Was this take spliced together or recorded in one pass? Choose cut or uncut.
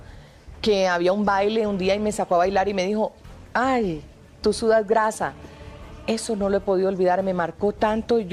uncut